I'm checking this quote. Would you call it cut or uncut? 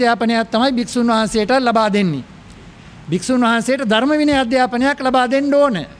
uncut